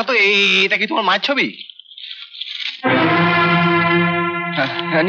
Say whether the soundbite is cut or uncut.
uncut